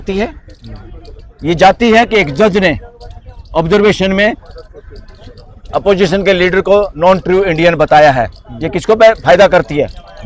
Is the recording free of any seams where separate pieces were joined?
yes; 0 cuts

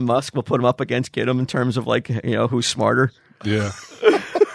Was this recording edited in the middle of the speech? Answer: no; 0 cuts

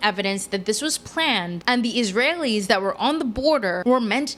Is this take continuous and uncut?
yes; 0 cuts

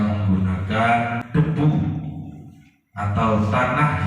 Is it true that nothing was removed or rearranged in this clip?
no; 1 cut; at 1.2 s

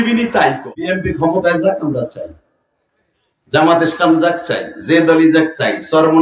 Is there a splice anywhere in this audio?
yes; 1 cut; at 0.9 s

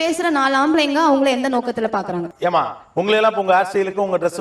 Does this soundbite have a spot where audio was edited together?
yes; 1 cut; at 2.3 s

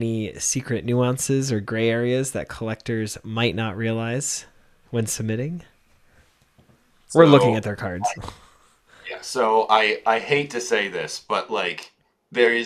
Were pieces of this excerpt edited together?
no; 0 cuts

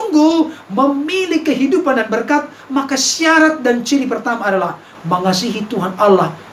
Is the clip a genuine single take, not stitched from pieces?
yes; 0 cuts

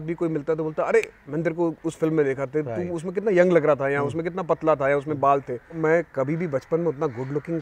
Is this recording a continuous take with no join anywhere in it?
no; 1 cut; at 5.8 s

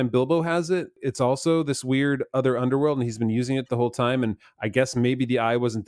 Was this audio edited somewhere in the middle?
yes; 1 cut; at 1.0 s

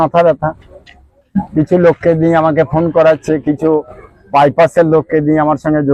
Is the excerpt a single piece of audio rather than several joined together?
yes; 0 cuts

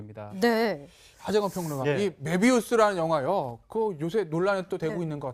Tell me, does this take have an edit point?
yes; 1 cut; at 1.7 s

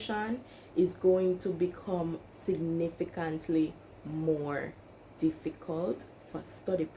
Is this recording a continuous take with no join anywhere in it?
yes; 0 cuts

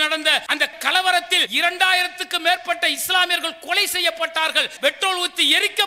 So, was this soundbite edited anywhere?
yes; 2 cuts; at 1.4 s, 4.7 s

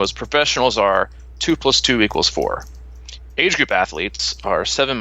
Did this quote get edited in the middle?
no; 0 cuts

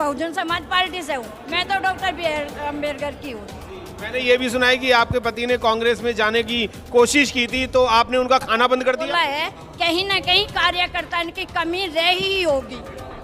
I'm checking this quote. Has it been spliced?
yes; 1 cut; at 9.1 s

